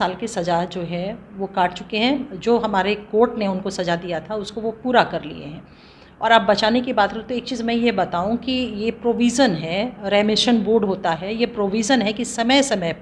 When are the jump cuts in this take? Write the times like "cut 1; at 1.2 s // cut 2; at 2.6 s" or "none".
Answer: none